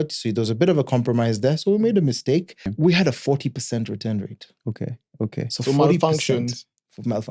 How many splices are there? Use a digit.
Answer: 1